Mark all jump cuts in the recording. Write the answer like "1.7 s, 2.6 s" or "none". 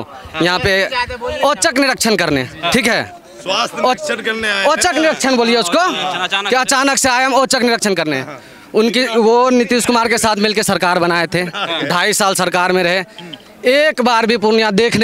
none